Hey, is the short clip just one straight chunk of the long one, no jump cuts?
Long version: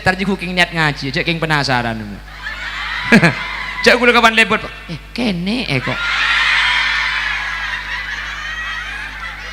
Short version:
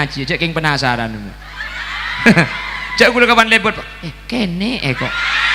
yes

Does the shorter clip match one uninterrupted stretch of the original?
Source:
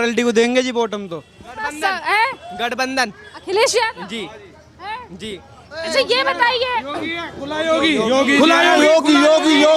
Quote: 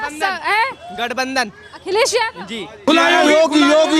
no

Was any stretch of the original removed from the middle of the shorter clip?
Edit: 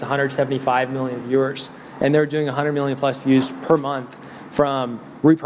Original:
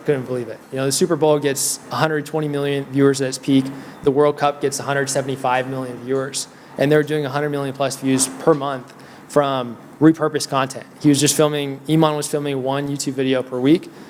no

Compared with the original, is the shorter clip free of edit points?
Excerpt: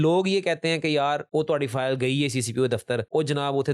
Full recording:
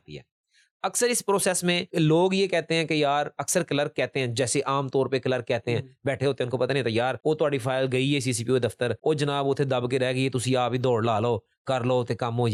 no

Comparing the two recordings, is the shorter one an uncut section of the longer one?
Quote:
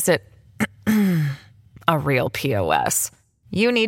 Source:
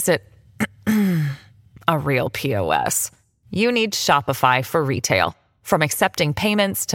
yes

